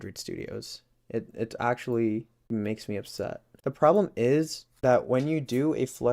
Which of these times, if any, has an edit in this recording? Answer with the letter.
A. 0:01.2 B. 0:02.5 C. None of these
B